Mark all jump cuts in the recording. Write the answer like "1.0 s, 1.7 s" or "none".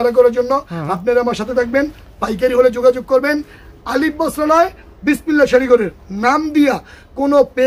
none